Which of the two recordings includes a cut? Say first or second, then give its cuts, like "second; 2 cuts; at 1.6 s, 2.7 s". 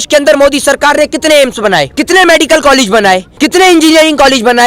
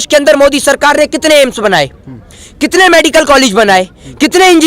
first; 2 cuts; at 1.9 s, 3.3 s